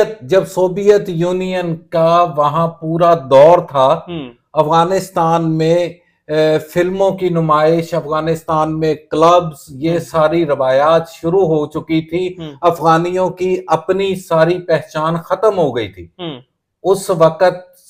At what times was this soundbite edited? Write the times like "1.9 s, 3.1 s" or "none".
none